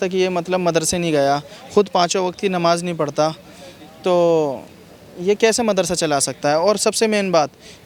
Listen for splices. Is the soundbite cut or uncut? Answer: uncut